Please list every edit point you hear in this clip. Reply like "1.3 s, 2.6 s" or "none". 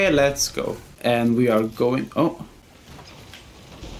2.6 s